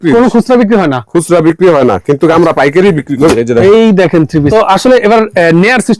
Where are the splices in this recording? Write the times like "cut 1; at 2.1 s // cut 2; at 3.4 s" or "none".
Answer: cut 1; at 4.5 s